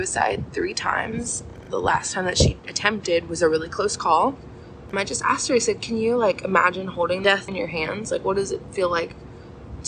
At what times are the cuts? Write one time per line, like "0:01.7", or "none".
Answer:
0:01.6
0:04.9
0:07.3